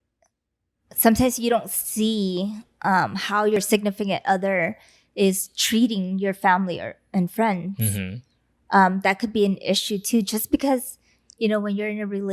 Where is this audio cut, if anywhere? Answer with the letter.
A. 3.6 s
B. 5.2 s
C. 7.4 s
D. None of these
A